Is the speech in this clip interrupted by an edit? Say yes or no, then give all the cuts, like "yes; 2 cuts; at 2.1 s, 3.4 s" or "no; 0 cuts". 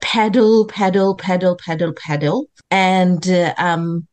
no; 0 cuts